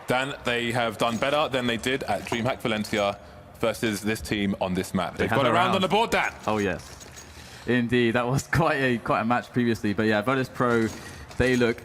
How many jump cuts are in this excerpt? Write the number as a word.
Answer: one